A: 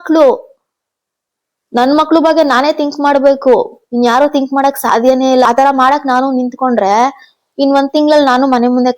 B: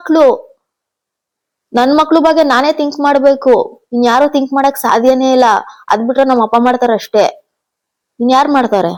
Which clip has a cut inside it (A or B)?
A